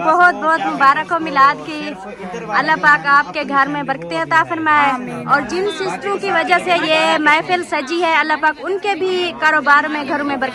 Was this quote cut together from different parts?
no; 0 cuts

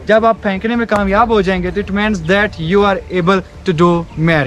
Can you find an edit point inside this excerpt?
no; 0 cuts

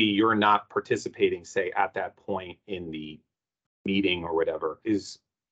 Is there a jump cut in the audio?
no; 0 cuts

